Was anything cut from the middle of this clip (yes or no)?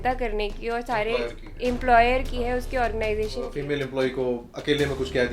yes